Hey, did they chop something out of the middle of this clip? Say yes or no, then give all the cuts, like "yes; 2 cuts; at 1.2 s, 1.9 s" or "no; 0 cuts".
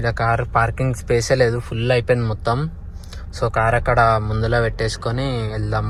no; 0 cuts